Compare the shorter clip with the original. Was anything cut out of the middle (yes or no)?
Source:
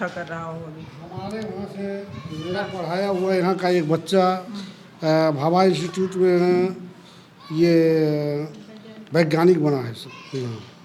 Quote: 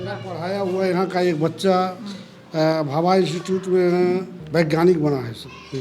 yes